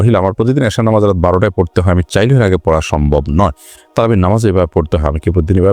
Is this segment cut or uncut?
uncut